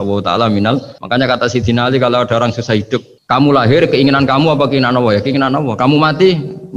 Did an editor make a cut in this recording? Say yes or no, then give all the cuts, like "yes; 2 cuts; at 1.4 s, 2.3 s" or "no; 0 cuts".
yes; 2 cuts; at 0.9 s, 3.1 s